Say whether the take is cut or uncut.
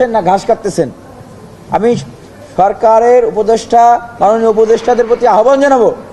uncut